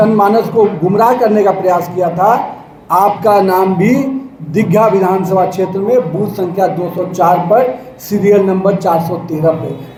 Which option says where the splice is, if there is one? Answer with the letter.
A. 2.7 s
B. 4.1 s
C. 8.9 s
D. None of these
D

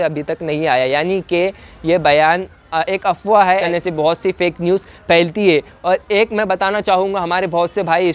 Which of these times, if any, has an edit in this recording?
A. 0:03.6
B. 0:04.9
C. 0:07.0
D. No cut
A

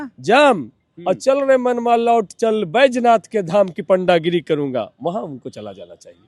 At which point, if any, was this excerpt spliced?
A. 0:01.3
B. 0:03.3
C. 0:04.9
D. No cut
D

